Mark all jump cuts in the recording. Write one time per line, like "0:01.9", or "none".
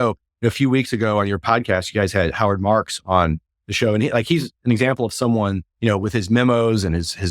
0:01.4
0:05.7